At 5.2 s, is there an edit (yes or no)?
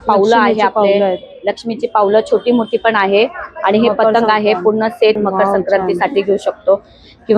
yes